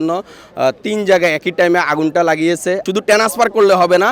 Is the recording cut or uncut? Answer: cut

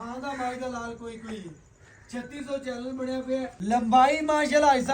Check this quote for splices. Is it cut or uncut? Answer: cut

